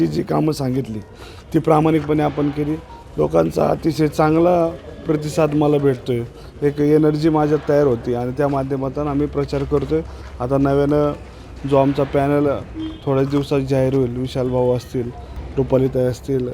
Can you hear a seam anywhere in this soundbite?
no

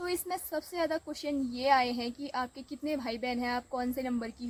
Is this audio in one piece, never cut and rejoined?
yes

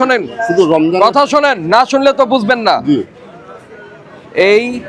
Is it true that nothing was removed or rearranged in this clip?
yes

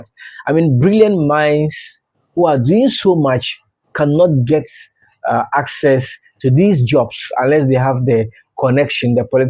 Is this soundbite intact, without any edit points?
yes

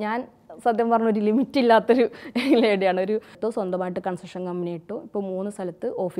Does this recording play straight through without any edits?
no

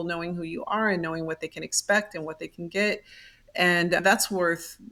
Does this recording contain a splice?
no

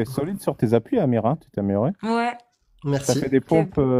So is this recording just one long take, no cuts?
yes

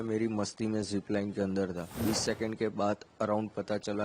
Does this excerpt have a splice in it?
yes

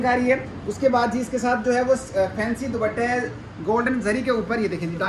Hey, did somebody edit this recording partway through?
no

